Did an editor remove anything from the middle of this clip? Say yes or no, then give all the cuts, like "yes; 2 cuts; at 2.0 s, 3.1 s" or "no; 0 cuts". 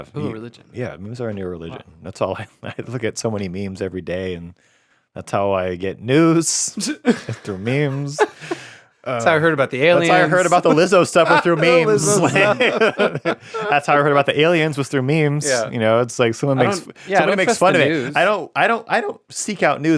no; 0 cuts